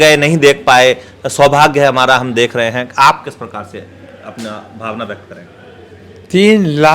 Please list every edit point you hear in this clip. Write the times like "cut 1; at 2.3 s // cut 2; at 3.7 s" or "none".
none